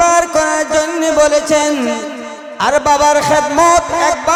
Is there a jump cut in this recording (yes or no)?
no